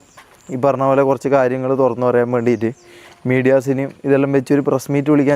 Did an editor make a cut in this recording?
no; 0 cuts

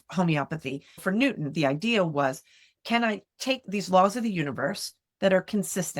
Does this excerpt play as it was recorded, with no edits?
no; 2 cuts; at 1.0 s, 3.6 s

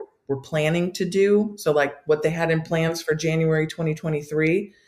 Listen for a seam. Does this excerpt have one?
no; 0 cuts

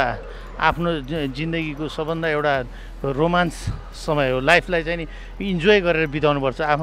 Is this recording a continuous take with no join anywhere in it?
yes; 0 cuts

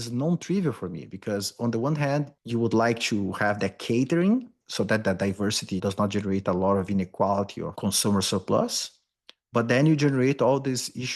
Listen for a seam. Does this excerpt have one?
yes; 2 cuts; at 4.7 s, 7.6 s

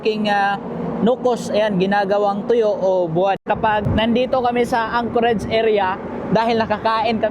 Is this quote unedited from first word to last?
no; 1 cut; at 3.5 s

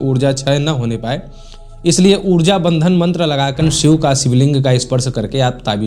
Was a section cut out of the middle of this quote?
yes; 1 cut; at 3.6 s

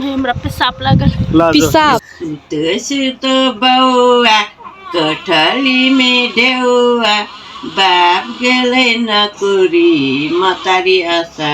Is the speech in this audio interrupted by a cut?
yes; 1 cut; at 2.0 s

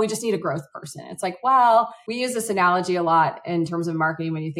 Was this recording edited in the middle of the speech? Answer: yes; 1 cut; at 2.0 s

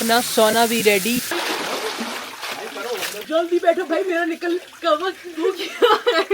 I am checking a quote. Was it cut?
yes; 1 cut; at 1.4 s

